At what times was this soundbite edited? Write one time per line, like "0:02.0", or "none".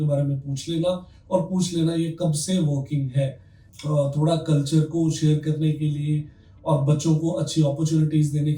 none